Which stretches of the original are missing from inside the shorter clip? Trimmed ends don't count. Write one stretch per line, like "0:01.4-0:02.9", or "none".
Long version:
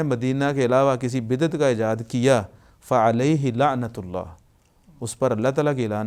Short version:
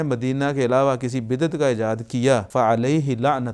0:02.5-0:02.8